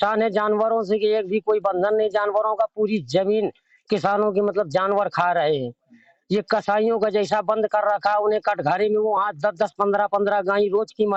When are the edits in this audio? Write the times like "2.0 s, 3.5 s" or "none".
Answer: none